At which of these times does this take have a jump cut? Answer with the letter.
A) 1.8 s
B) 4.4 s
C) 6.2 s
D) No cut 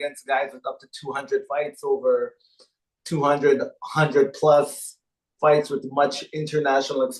D